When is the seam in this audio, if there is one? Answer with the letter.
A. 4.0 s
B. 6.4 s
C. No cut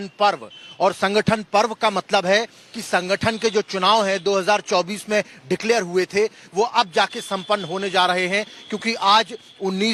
C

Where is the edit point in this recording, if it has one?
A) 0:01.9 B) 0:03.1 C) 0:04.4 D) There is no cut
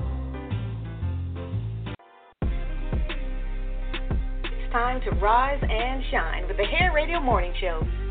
A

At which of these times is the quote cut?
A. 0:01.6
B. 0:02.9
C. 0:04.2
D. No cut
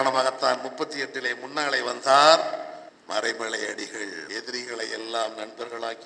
C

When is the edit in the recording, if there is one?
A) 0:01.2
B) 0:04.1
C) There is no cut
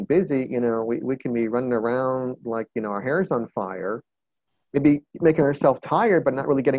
C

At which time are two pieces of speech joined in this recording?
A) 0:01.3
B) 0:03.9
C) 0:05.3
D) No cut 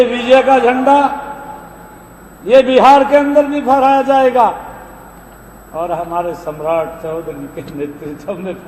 D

